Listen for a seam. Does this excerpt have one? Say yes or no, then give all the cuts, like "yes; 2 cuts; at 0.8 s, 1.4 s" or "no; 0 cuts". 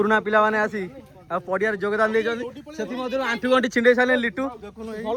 no; 0 cuts